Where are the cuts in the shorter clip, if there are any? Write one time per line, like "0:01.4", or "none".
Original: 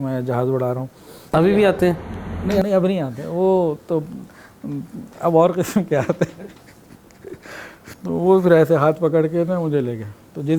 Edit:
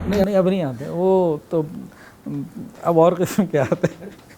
none